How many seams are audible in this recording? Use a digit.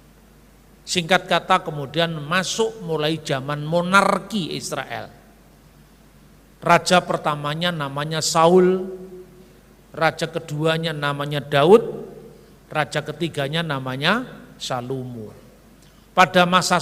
0